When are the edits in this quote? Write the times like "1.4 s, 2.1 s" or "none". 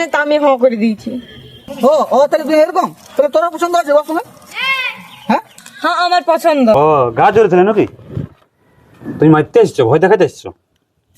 6.7 s